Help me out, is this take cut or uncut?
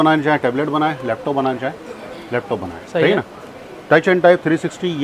uncut